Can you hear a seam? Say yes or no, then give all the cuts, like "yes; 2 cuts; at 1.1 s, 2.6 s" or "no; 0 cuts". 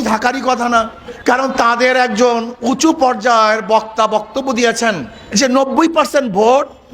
yes; 2 cuts; at 1.0 s, 5.1 s